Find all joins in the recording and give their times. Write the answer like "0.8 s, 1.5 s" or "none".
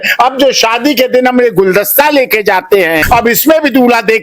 3.0 s